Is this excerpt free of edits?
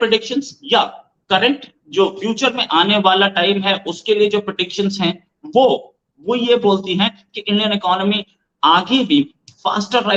yes; 0 cuts

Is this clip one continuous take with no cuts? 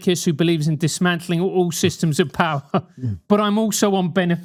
yes; 0 cuts

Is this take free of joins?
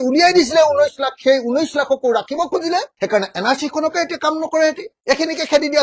no; 1 cut; at 4.9 s

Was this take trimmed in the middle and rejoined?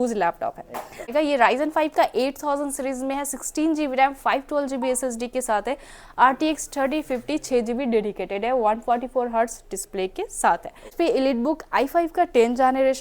yes; 2 cuts; at 1.1 s, 10.9 s

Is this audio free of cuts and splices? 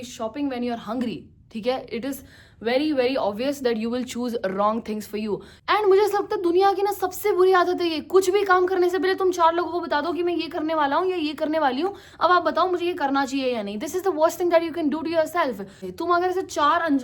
no; 2 cuts; at 5.5 s, 15.8 s

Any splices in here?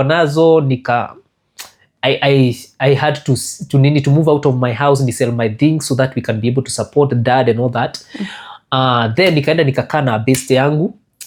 no; 0 cuts

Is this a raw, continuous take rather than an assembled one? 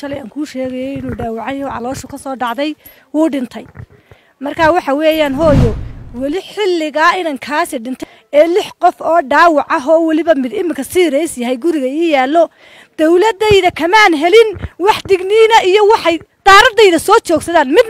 yes; 0 cuts

